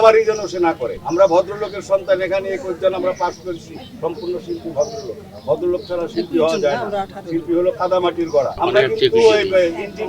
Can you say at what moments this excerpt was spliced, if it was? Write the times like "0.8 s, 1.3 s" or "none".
1.0 s, 8.5 s